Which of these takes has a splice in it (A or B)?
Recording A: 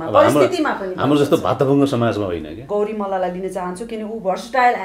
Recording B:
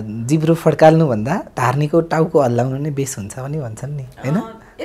A